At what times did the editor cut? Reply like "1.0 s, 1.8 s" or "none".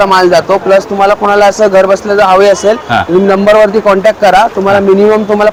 none